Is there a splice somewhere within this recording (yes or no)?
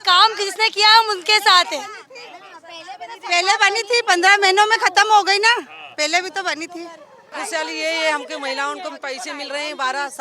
yes